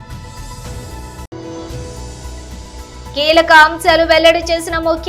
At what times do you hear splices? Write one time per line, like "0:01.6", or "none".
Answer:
0:01.2
0:03.0

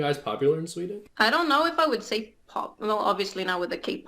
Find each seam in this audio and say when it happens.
0:01.0

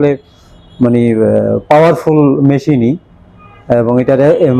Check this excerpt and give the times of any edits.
none

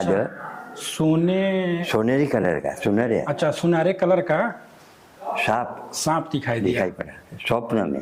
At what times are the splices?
none

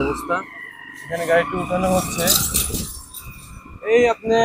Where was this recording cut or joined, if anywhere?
none

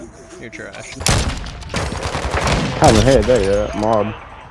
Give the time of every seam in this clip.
0:00.9

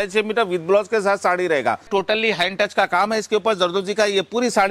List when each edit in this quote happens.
0:01.9

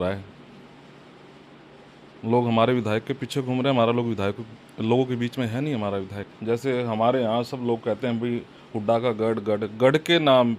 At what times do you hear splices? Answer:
0:06.3

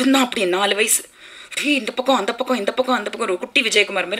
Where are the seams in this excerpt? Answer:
none

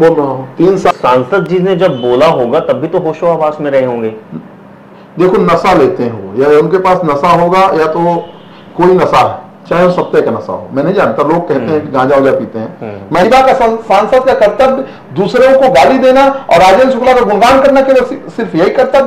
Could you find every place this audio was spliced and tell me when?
0:00.9
0:13.2

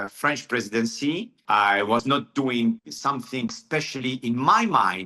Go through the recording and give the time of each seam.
0:01.3

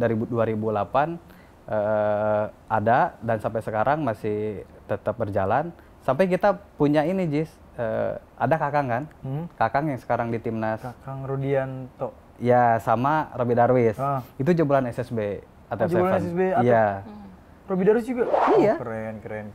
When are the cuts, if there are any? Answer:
none

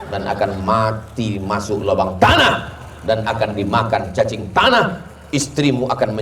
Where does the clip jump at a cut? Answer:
none

